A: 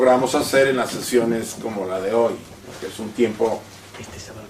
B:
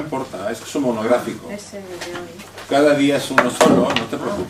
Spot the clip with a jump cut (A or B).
A